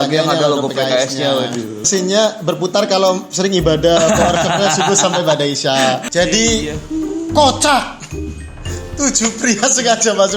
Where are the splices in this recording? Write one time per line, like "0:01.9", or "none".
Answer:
0:01.8
0:06.1